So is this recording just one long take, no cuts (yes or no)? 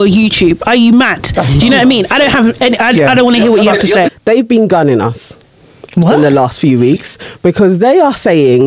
no